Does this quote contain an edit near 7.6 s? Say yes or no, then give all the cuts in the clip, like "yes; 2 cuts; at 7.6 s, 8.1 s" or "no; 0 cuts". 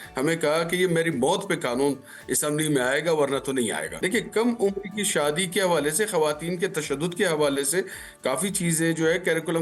no; 1 cut; at 4.0 s